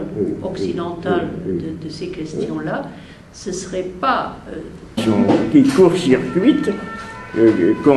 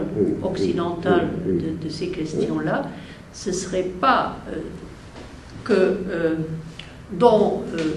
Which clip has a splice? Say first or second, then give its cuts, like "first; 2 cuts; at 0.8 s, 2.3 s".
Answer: second; 1 cut; at 5.0 s